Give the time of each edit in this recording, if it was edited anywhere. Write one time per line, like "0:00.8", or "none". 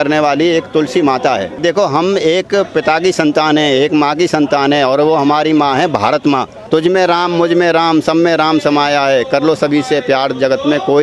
0:01.6
0:06.5

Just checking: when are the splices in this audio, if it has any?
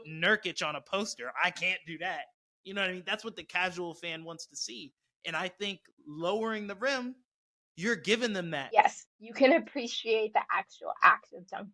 0:08.6

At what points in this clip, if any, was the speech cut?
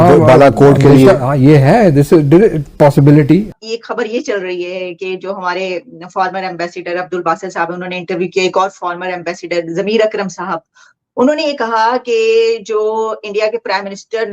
0:03.6

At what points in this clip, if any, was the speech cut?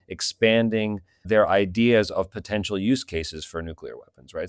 0:01.1

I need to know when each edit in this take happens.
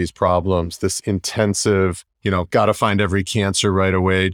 0:02.1

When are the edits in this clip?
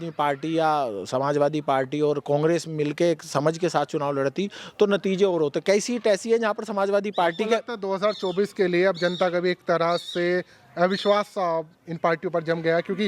none

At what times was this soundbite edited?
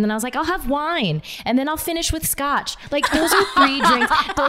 none

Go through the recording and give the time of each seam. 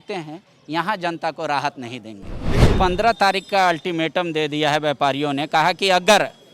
0:02.6

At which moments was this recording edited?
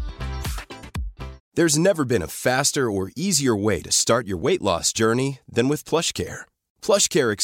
0:01.4

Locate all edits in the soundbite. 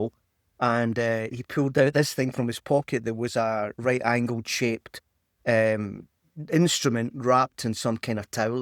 none

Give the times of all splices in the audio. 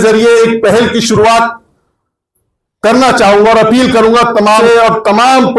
0:04.6

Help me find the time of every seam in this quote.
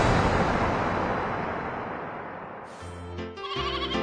0:03.0

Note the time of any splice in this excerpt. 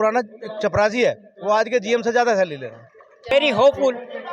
0:03.3

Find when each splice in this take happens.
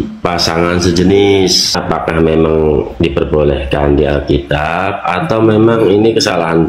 0:01.7

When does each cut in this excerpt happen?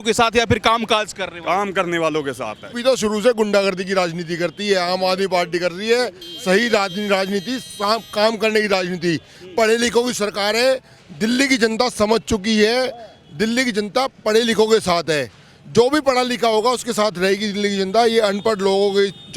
0:02.7

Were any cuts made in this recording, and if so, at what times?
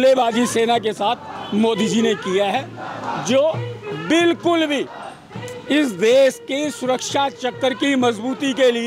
none

